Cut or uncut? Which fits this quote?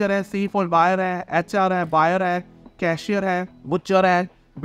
uncut